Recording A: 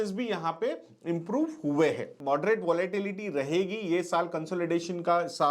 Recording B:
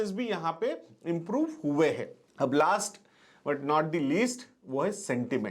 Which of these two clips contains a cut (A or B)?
A